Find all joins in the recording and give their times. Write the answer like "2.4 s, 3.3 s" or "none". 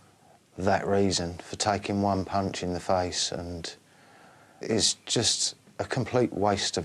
4.6 s